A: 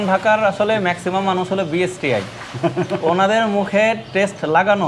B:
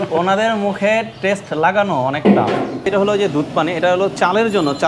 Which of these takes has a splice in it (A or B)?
B